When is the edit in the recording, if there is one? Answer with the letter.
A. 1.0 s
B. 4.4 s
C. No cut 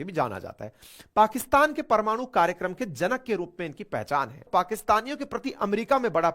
B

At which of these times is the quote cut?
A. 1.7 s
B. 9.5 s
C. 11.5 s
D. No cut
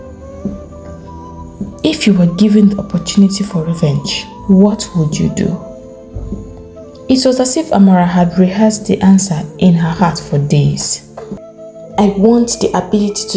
C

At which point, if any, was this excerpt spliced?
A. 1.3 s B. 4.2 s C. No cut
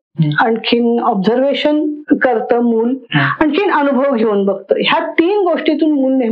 C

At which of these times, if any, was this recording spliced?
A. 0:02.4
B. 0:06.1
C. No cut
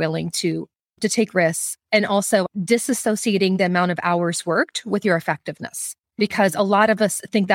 A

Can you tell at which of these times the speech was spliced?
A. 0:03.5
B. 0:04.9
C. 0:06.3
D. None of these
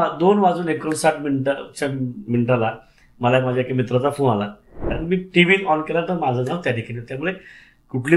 B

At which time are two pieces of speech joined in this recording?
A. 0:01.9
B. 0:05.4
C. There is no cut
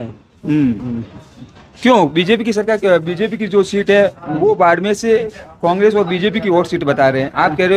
C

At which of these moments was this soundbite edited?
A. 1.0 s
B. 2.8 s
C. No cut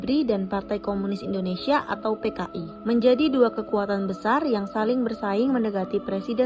C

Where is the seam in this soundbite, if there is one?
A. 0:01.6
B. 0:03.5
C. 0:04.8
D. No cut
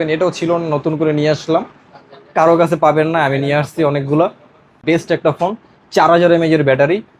C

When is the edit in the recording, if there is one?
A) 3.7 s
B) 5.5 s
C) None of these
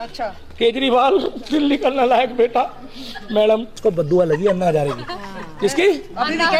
A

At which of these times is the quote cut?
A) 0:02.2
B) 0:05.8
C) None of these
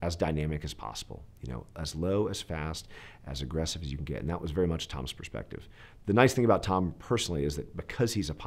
C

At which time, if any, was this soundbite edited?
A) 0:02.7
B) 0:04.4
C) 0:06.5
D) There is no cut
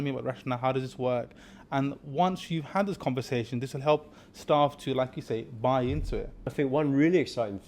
C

